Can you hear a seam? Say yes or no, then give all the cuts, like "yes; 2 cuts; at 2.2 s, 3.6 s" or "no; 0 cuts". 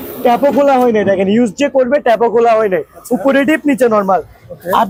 no; 0 cuts